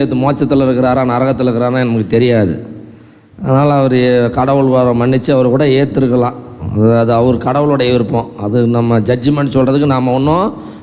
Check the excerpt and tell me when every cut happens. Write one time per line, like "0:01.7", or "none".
none

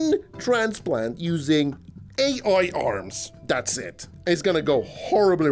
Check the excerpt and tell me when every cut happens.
none

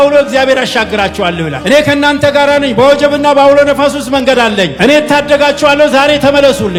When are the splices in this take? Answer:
none

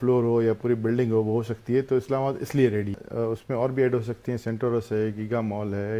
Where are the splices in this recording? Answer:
0:03.0

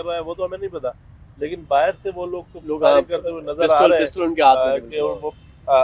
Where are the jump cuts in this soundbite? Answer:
none

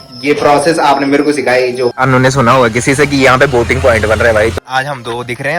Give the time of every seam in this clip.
0:01.9
0:04.6

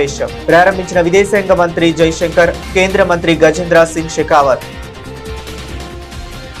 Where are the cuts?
0:04.6

